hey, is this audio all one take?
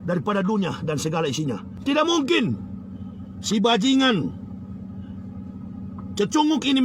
no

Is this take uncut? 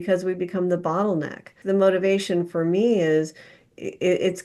no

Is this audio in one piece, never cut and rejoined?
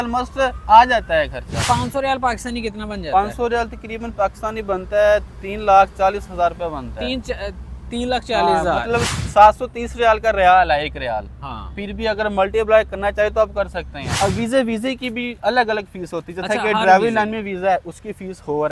no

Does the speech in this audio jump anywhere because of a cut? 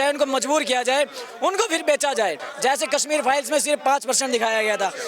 yes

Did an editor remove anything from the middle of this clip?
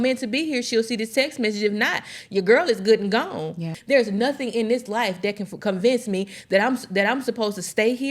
yes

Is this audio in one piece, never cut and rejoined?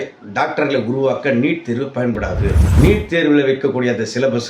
no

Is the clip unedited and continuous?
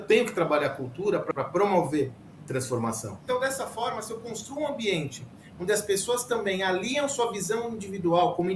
no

